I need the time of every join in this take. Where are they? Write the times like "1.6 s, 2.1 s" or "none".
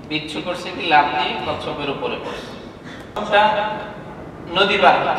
3.2 s